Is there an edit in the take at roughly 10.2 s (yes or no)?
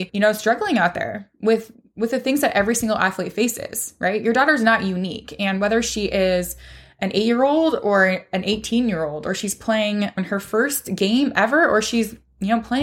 yes